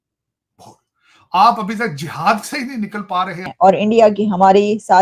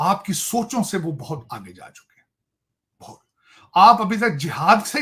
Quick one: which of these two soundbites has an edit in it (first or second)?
first